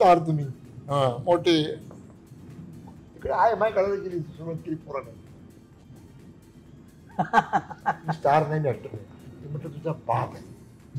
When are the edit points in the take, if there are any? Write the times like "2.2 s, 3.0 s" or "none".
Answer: none